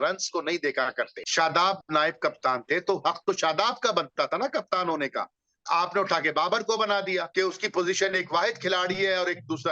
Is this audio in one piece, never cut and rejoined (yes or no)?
no